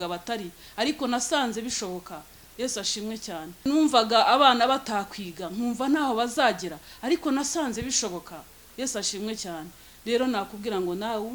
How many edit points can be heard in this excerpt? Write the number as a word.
one